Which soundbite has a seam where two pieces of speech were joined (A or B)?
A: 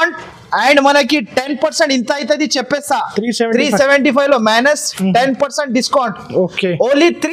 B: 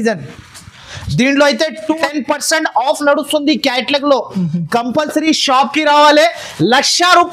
B